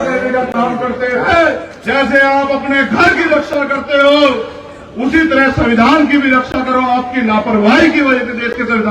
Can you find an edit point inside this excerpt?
yes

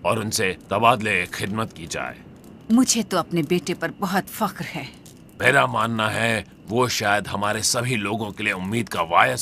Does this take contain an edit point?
yes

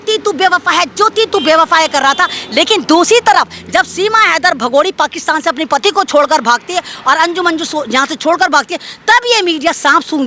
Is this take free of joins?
yes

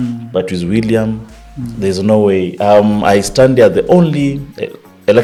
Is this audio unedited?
yes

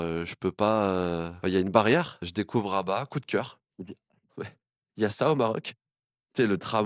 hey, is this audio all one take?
no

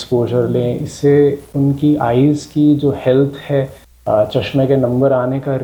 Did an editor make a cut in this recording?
no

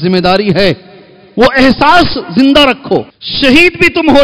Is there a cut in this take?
yes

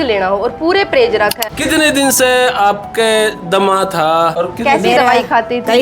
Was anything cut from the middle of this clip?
yes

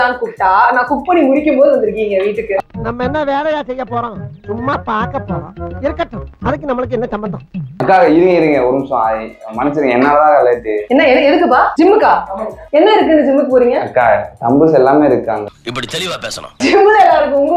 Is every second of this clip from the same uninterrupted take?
yes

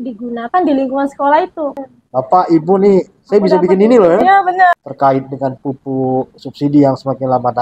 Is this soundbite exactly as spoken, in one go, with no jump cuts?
no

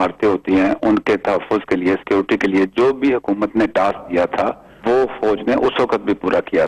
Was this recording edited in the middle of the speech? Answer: yes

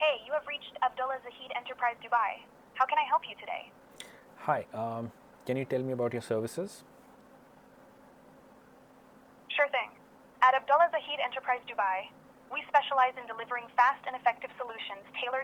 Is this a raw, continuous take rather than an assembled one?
yes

